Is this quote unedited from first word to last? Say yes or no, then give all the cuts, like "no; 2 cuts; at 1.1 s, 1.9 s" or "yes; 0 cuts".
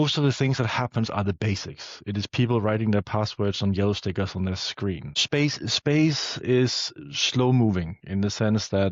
no; 1 cut; at 5.1 s